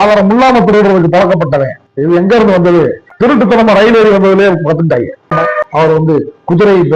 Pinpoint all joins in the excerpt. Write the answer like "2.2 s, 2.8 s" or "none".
5.3 s